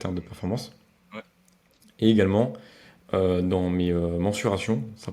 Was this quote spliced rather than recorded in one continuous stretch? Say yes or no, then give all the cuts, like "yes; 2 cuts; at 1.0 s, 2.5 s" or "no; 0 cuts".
no; 0 cuts